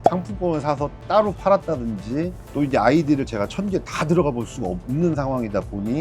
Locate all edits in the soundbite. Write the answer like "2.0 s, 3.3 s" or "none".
none